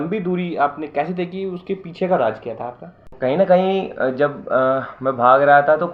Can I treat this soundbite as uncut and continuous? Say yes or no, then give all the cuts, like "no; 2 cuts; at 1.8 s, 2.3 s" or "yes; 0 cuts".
no; 1 cut; at 3.1 s